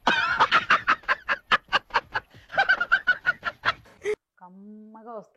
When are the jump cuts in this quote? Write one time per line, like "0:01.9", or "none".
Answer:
0:04.4